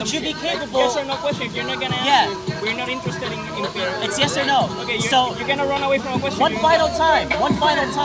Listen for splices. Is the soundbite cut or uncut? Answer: uncut